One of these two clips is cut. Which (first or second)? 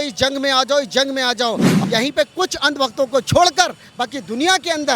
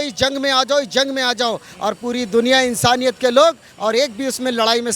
first